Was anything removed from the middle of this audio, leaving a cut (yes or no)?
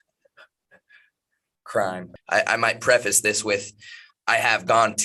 yes